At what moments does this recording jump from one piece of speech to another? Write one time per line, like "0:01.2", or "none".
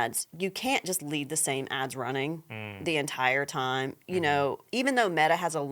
0:04.6

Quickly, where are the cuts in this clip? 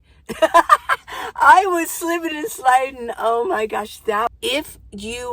0:04.3

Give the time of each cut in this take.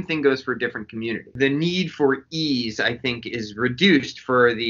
0:01.3

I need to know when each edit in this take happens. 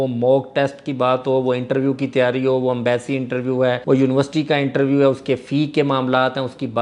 none

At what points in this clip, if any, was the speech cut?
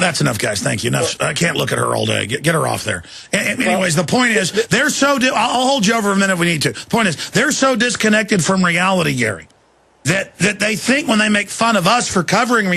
0:09.2

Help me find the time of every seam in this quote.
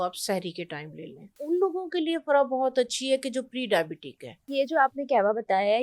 0:01.4
0:04.5

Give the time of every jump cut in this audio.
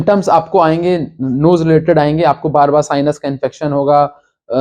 none

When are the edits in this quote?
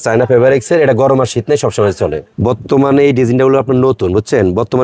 0:02.3

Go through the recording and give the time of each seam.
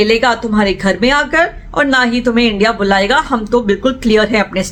none

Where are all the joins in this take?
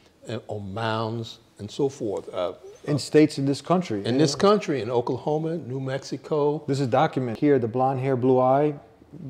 0:07.3

